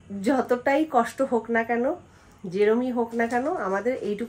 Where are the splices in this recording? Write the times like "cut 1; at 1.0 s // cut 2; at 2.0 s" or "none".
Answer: none